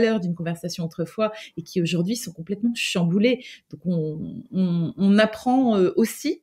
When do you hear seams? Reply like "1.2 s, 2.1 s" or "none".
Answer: none